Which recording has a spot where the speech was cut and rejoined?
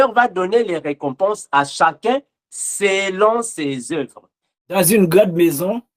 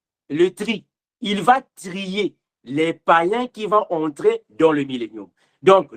first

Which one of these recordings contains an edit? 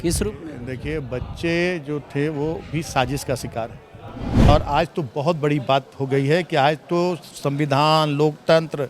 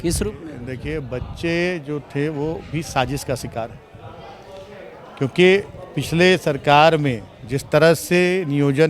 first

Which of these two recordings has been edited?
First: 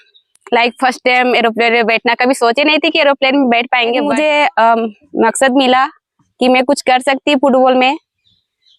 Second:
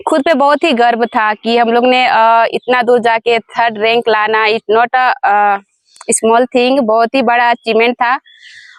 first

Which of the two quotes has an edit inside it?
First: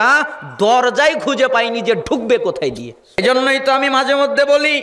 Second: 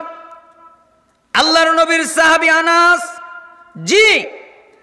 first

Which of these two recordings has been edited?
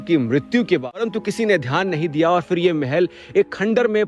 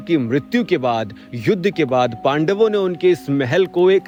first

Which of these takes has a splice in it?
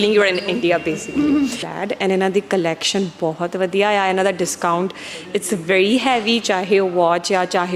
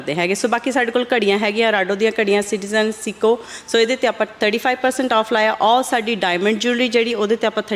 first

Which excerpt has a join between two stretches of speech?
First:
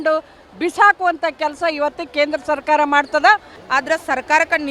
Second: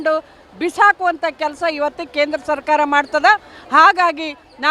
first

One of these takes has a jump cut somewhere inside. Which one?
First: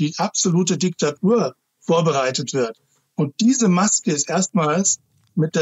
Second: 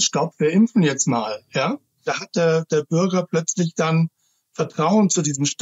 second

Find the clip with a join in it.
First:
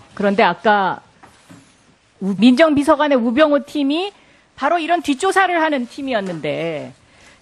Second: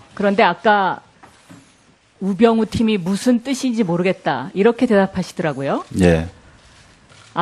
second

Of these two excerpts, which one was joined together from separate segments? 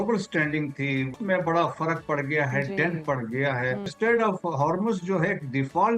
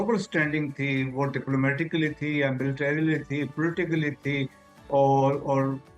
first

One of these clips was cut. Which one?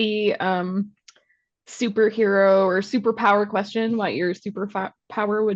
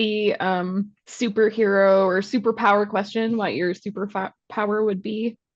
second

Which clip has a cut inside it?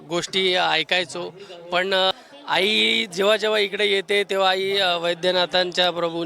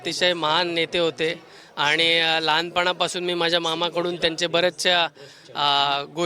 first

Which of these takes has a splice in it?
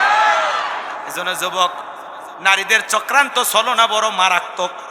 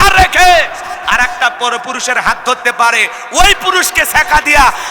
first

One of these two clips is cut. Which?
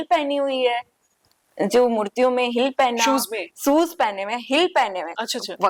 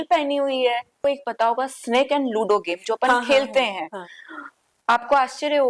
second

